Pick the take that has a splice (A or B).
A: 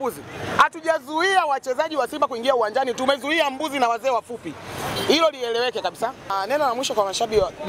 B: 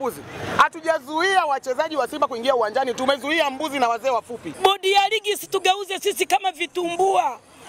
B